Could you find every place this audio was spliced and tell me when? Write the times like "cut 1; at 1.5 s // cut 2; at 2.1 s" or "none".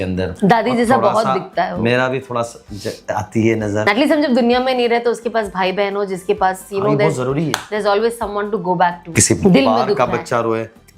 cut 1; at 3.9 s // cut 2; at 9.1 s